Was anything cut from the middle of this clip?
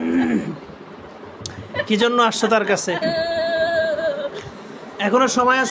yes; 1 cut; at 3.0 s

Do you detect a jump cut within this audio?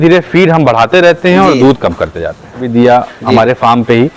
yes; 1 cut; at 2.7 s

